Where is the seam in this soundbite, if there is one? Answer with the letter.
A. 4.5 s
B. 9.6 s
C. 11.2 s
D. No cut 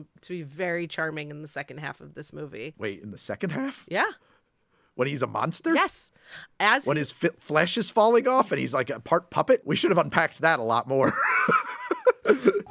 B